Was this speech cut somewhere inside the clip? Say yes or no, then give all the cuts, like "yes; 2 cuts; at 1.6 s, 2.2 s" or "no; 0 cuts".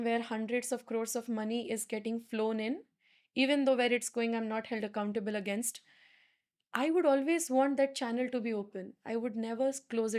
no; 0 cuts